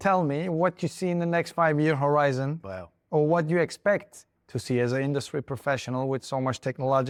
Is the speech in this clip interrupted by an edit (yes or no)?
no